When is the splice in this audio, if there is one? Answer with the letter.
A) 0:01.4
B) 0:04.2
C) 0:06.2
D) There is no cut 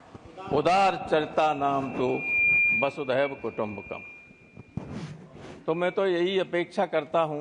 D